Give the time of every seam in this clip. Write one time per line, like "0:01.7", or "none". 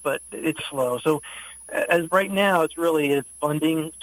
none